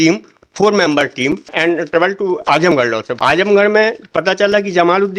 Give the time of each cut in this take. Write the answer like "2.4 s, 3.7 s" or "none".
1.5 s, 3.1 s